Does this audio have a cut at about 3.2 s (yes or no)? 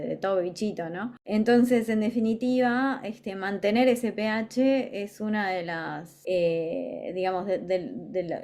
no